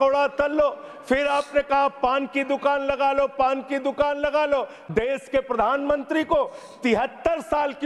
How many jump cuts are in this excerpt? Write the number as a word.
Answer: one